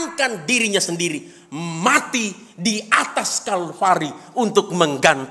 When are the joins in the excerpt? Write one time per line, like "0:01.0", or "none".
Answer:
none